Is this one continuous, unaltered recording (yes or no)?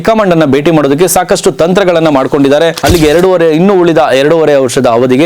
no